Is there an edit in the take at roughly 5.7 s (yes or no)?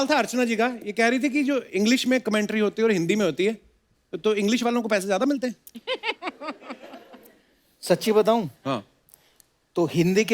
no